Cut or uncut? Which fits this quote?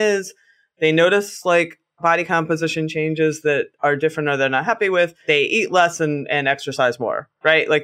uncut